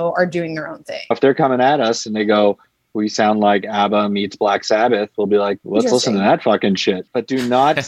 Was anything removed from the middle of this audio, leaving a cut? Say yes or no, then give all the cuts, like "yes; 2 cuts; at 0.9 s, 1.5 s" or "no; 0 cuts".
yes; 3 cuts; at 1.1 s, 5.6 s, 7.0 s